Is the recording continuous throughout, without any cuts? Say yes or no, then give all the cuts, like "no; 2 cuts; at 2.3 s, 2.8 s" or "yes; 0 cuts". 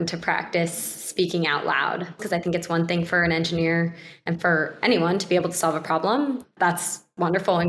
no; 2 cuts; at 2.2 s, 6.5 s